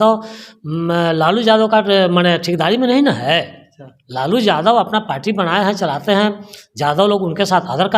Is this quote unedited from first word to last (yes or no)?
yes